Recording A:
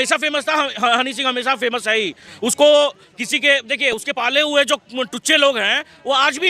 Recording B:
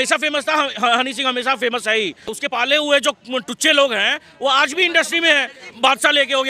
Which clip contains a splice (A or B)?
B